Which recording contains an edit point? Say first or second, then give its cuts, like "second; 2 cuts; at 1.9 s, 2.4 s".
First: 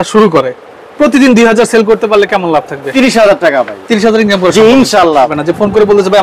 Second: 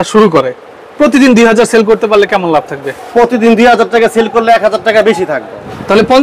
first; 2 cuts; at 2.8 s, 5.4 s